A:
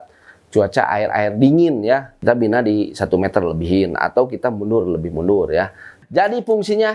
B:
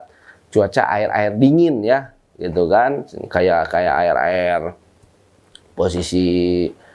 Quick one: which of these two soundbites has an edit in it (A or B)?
A